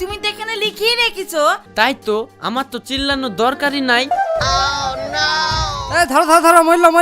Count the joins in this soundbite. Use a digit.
2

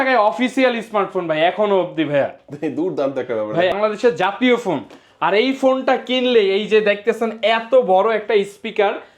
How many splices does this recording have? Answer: 1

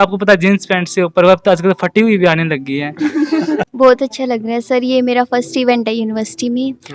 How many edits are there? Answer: 1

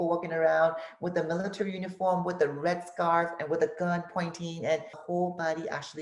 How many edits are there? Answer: 1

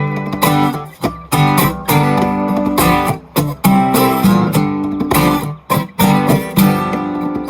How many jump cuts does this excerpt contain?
1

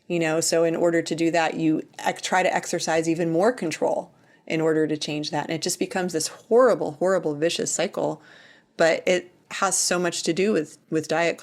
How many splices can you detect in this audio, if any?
1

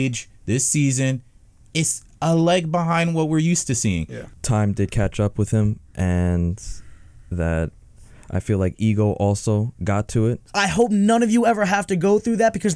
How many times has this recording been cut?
2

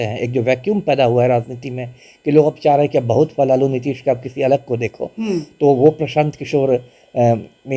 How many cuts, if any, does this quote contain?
0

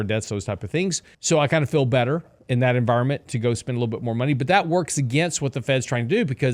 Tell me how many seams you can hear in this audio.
2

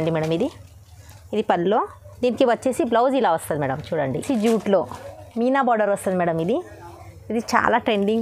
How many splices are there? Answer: 1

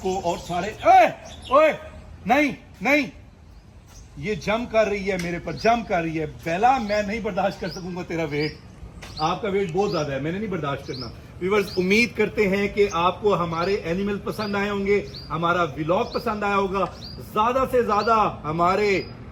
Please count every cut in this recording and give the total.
0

